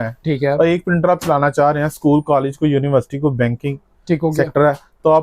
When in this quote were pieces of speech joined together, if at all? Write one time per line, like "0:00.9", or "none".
none